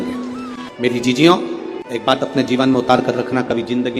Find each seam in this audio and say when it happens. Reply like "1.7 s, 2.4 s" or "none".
2.0 s